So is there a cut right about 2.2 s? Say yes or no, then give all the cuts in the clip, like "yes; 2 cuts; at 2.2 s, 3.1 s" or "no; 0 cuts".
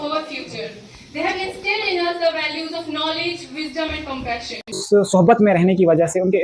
no; 1 cut; at 4.8 s